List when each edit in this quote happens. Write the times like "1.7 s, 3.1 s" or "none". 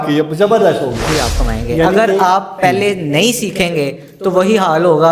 1.0 s